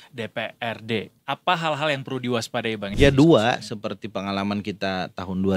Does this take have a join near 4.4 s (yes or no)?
no